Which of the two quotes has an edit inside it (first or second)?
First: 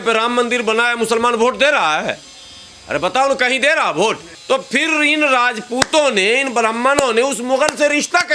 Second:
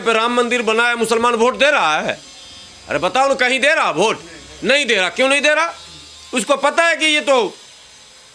first